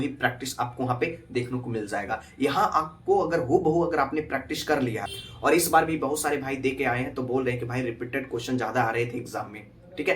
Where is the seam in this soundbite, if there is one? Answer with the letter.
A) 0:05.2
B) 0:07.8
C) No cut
A